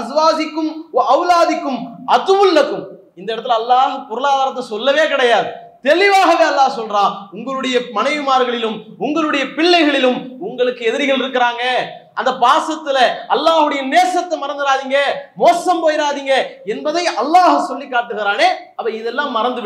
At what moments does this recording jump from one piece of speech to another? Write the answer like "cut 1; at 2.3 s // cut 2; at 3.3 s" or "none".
cut 1; at 18.7 s